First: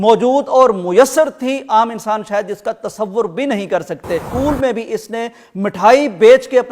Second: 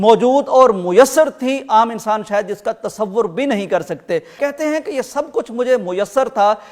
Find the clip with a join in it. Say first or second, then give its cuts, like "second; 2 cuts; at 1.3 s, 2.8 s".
first; 1 cut; at 4.3 s